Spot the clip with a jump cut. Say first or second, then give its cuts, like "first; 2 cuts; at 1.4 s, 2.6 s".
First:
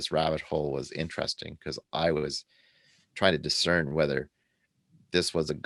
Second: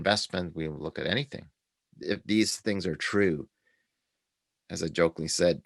second; 1 cut; at 1.9 s